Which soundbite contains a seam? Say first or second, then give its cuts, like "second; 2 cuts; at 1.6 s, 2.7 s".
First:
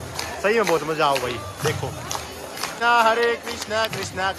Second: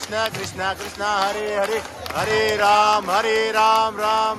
first; 1 cut; at 2.7 s